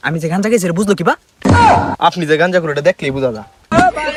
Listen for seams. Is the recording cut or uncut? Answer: uncut